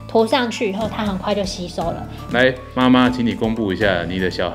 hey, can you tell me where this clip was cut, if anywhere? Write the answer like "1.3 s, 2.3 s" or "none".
2.3 s